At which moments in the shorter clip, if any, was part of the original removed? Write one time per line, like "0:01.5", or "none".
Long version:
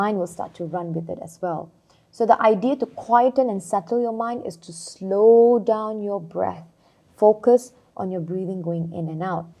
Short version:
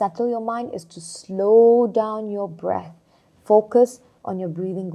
none